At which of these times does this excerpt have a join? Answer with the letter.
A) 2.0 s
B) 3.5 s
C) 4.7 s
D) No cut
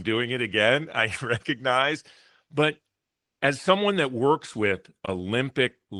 D